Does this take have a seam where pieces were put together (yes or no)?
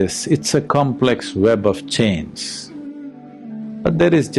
yes